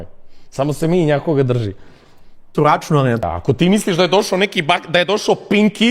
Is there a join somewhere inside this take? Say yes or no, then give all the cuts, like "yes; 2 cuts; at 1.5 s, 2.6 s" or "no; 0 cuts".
yes; 1 cut; at 3.2 s